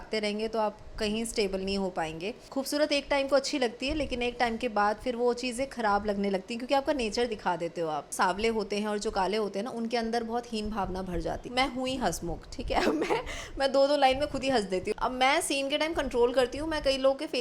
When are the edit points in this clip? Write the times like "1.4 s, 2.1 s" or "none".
2.4 s, 8.1 s, 11.4 s, 14.9 s